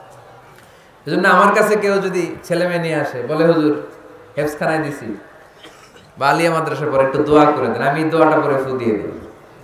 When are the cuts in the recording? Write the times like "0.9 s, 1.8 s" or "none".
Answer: none